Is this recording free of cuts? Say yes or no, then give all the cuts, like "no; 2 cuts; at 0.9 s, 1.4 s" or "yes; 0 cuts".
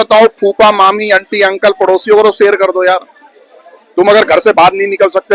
yes; 0 cuts